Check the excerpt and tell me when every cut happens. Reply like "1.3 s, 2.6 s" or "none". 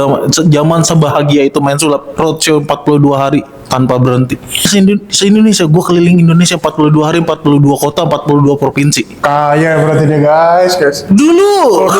4.7 s